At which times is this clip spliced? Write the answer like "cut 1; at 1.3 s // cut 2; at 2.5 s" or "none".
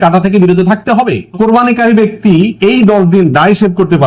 cut 1; at 1.4 s